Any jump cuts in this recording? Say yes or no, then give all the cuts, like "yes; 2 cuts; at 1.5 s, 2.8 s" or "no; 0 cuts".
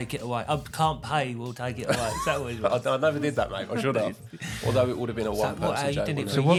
no; 0 cuts